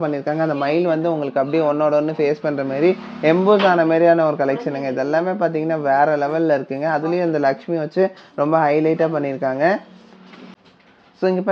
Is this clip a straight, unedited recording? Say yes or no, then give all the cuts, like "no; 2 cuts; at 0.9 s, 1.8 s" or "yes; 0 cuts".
yes; 0 cuts